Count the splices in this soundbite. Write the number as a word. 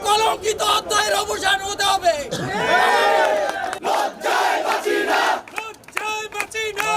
zero